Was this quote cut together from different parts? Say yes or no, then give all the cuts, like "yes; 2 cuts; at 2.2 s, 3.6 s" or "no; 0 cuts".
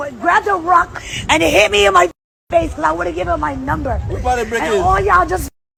no; 0 cuts